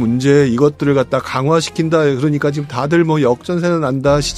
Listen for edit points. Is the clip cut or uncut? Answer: uncut